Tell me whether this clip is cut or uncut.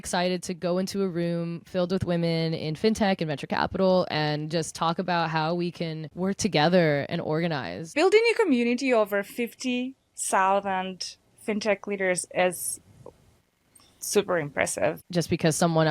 cut